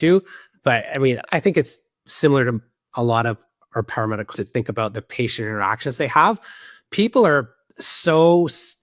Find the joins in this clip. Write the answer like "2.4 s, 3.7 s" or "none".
1.3 s, 4.3 s